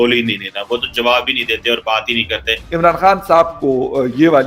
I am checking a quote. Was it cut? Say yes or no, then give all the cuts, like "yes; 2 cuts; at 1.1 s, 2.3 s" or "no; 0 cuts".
yes; 1 cut; at 2.6 s